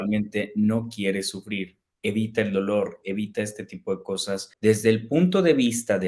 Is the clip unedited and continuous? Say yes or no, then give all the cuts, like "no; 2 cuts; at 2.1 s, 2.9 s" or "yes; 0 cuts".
no; 1 cut; at 4.5 s